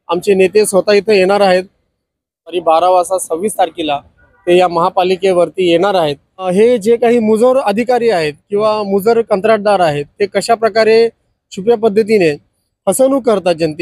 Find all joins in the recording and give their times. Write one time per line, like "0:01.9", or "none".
0:02.6
0:06.5

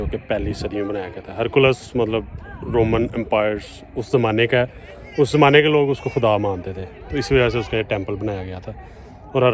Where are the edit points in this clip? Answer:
none

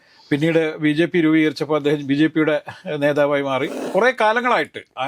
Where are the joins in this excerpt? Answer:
0:03.8

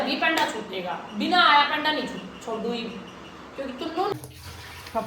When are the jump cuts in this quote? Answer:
0:04.1

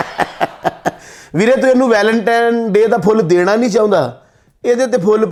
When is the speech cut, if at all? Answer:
none

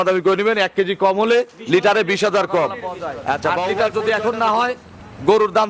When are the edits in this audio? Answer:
0:03.7

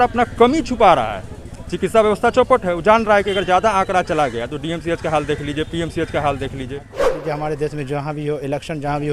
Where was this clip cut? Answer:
0:07.1

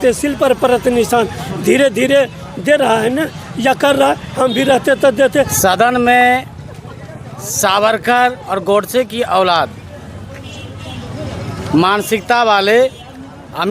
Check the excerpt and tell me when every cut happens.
0:05.5

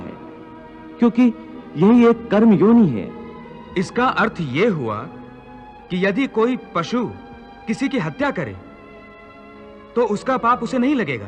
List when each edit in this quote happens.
none

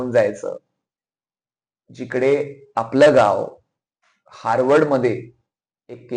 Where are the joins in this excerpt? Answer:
none

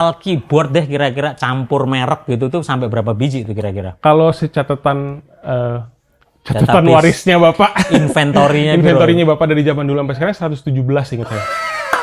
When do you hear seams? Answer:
none

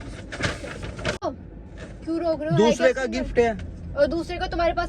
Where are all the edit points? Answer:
0:01.2

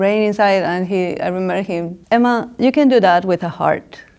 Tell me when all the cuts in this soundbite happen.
0:01.9

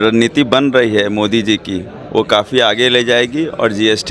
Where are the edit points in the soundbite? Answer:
none

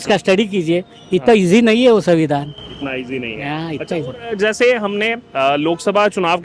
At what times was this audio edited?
none

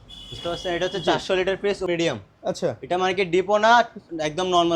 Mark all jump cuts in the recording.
0:01.9

